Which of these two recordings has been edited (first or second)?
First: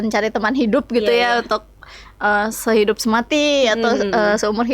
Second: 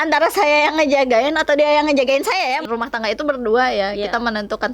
second